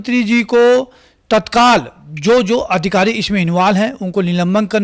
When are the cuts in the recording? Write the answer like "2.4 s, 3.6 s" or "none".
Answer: none